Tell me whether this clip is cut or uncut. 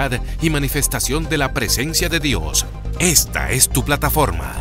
uncut